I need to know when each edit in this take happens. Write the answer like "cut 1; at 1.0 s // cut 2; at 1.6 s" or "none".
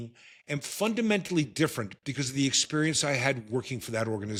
none